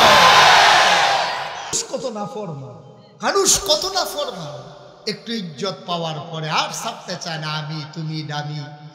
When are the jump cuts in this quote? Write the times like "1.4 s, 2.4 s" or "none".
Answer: 1.9 s